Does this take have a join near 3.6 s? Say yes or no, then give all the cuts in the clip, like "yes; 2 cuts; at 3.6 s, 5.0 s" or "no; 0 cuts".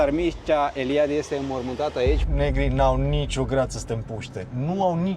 no; 1 cut; at 2.2 s